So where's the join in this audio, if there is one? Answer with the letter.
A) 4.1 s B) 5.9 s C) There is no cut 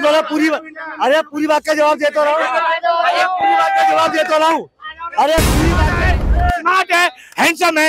B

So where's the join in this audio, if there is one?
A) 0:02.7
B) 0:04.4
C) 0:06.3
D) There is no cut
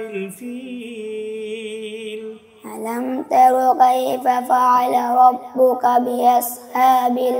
D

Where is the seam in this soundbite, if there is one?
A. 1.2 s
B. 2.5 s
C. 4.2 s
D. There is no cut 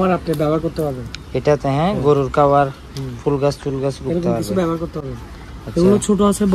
D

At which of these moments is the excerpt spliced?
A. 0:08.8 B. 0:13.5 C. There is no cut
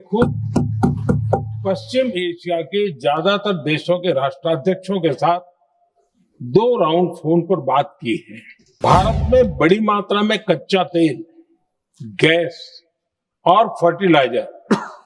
A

